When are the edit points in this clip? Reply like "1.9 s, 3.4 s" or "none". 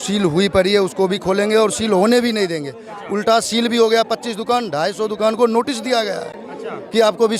none

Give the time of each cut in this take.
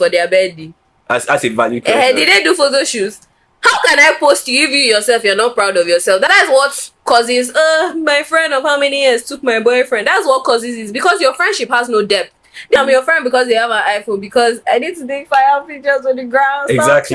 6.3 s, 12.8 s

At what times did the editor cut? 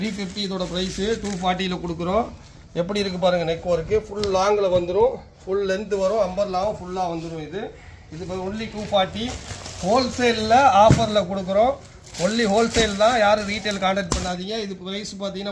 none

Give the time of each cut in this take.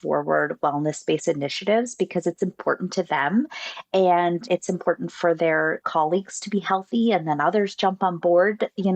4.4 s, 5.8 s

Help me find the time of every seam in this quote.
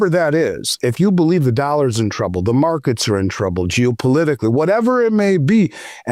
none

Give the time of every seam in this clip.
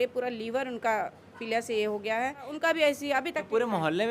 2.5 s

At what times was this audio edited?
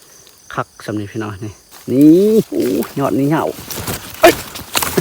1.7 s, 2.5 s

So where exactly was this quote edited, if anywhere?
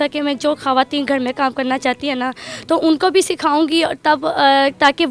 none

